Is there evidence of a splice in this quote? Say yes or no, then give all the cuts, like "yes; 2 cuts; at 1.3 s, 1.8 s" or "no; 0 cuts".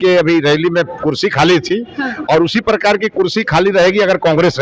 no; 0 cuts